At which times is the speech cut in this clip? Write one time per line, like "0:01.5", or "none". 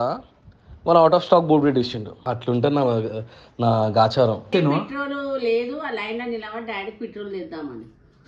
0:04.4

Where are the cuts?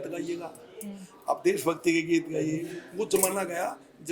0:02.8

